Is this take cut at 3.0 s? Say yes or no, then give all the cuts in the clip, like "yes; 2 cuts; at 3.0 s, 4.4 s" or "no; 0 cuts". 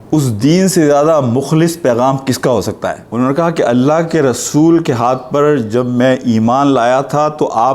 yes; 1 cut; at 3.0 s